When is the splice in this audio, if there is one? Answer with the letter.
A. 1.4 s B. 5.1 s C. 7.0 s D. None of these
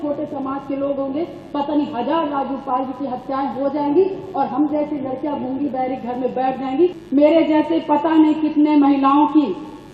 C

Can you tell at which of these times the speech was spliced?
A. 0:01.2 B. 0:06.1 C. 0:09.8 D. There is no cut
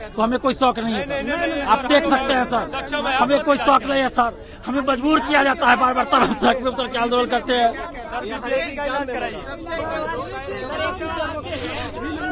C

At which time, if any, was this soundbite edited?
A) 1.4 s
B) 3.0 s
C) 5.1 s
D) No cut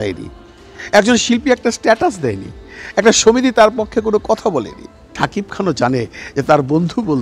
C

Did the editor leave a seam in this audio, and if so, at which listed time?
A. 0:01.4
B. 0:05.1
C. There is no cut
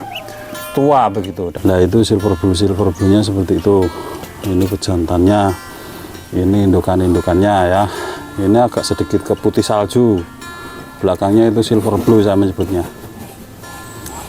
A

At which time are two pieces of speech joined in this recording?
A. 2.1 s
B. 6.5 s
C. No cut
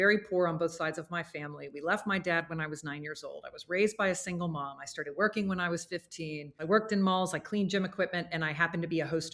B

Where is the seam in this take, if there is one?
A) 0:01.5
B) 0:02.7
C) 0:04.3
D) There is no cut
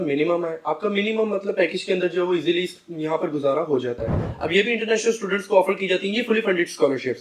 C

